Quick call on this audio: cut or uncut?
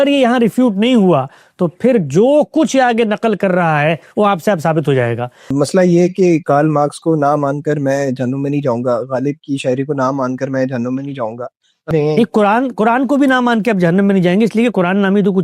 cut